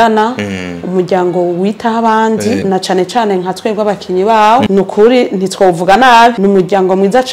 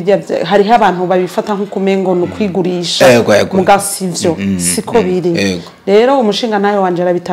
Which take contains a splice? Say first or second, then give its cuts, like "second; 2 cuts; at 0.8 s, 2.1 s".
first; 3 cuts; at 2.6 s, 4.7 s, 6.4 s